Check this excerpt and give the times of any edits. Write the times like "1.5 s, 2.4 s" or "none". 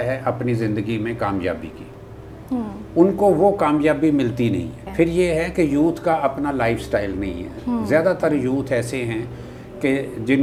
none